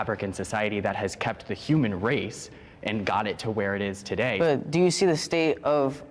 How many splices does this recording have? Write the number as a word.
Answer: one